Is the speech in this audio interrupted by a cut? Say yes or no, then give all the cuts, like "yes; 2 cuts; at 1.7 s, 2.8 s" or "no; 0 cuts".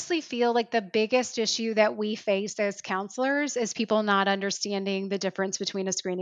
no; 0 cuts